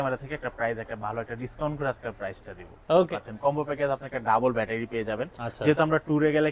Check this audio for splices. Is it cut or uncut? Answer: cut